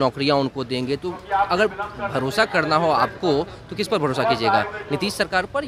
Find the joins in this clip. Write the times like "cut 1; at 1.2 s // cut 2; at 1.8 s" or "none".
none